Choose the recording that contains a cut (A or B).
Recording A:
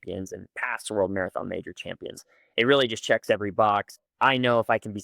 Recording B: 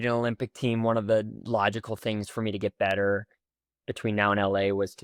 A